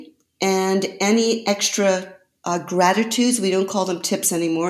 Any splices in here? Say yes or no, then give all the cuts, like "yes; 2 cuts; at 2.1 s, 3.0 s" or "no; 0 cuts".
no; 0 cuts